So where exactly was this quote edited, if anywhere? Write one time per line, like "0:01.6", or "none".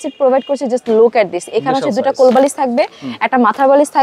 none